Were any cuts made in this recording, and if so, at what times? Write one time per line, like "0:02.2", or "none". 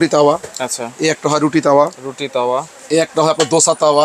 none

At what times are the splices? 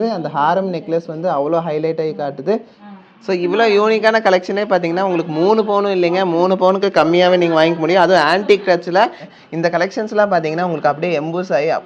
0:02.9
0:09.2

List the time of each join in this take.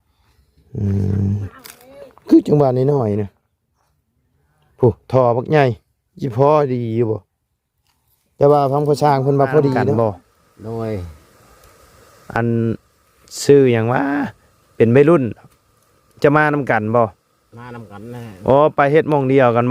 0:09.9

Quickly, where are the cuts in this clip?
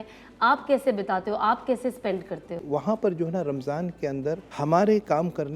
0:02.6
0:04.5

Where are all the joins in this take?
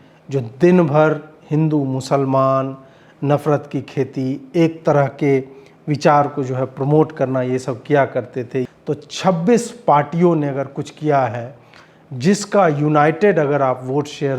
0:08.7

